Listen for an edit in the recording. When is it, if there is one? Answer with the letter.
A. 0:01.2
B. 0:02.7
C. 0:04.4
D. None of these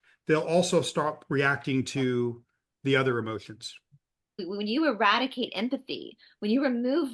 C